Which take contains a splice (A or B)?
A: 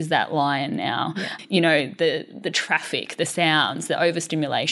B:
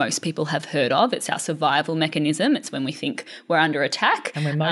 A